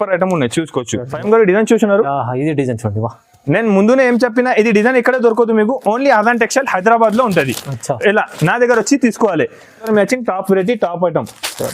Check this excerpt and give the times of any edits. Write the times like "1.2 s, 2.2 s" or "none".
1.1 s, 9.8 s